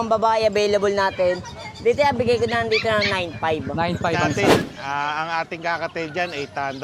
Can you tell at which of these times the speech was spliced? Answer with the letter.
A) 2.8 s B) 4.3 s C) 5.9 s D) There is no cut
B